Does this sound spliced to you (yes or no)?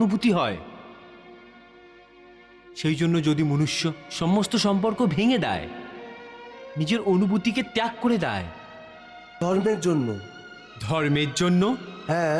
yes